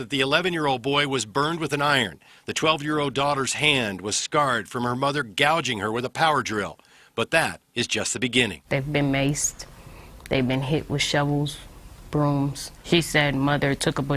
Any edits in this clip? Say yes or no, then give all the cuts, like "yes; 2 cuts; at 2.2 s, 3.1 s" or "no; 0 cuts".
no; 0 cuts